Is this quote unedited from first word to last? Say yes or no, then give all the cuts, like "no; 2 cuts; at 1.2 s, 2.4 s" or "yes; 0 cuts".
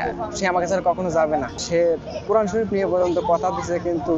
yes; 0 cuts